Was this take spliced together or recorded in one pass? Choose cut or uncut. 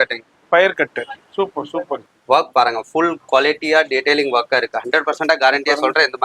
cut